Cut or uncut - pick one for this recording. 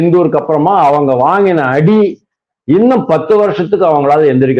uncut